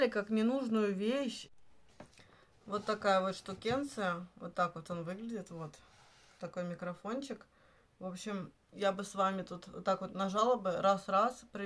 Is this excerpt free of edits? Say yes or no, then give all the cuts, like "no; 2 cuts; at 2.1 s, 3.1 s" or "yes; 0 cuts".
no; 1 cut; at 1.4 s